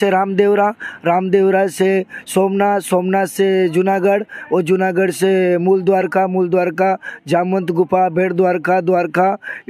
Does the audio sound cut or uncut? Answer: uncut